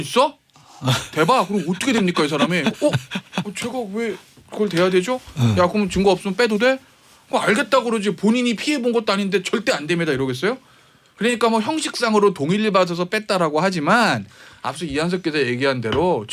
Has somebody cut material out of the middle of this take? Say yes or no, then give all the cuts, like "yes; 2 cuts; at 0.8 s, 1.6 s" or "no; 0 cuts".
no; 0 cuts